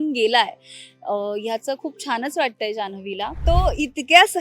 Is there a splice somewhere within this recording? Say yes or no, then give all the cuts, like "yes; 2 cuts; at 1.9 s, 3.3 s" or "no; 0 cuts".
yes; 1 cut; at 3.4 s